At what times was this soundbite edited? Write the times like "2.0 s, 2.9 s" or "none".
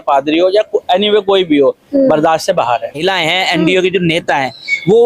3.0 s